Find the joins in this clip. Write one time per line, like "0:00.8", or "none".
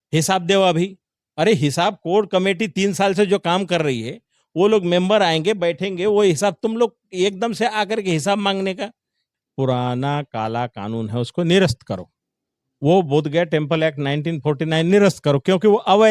0:09.2